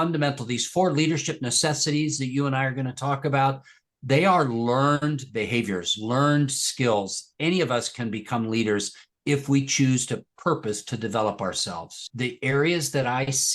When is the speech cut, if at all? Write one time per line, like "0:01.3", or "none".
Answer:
0:12.1